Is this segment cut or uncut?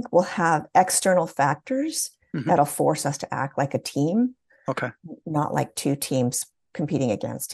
uncut